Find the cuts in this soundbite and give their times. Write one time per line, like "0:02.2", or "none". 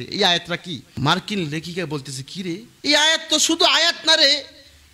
0:00.9
0:02.7